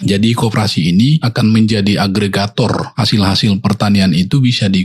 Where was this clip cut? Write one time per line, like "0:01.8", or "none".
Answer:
0:01.3
0:02.9